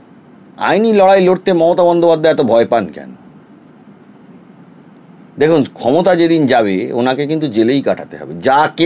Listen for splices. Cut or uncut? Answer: uncut